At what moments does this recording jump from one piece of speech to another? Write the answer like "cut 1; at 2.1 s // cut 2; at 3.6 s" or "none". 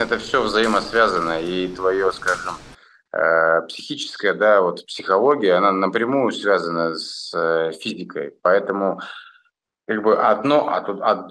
none